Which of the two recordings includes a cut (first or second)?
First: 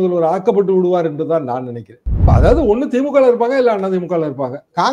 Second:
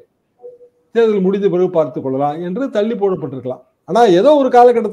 first